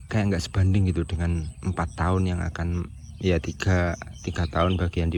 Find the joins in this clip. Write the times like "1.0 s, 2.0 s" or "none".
none